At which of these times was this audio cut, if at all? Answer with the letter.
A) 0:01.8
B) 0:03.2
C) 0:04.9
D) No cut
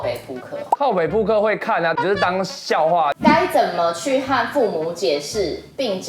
B